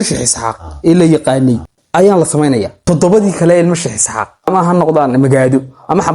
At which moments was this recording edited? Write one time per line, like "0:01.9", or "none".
0:01.7
0:02.8
0:04.5